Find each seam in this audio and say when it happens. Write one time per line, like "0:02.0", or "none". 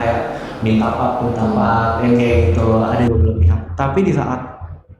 0:03.1